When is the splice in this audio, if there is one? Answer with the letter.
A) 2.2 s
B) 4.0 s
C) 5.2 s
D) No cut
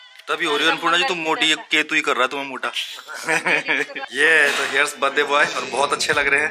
B